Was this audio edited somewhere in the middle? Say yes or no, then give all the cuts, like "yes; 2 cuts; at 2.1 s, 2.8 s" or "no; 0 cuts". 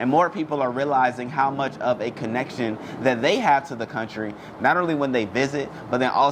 no; 0 cuts